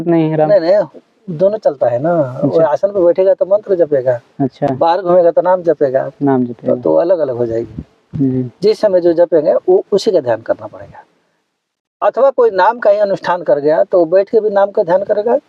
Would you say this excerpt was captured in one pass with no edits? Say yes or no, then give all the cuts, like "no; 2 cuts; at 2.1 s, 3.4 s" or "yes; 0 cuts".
yes; 0 cuts